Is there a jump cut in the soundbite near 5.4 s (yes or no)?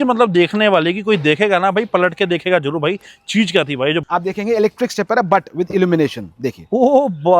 no